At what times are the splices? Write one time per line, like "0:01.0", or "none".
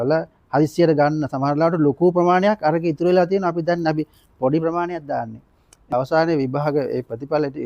0:05.7